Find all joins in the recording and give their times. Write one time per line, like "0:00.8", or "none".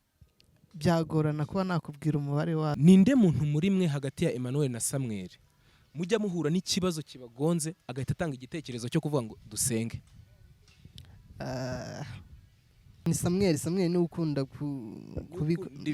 0:02.7
0:13.0